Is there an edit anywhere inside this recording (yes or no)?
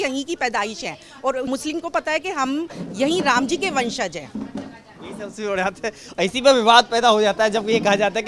no